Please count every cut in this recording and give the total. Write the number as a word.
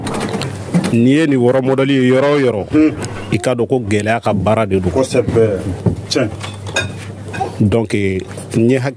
zero